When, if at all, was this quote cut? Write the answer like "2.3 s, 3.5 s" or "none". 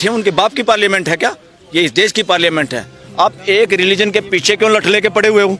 3.0 s